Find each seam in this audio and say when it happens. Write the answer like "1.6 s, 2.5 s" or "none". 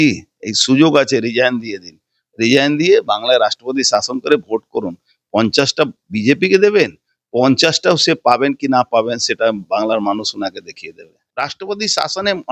11.2 s